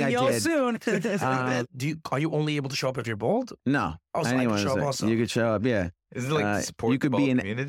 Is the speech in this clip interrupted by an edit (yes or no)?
yes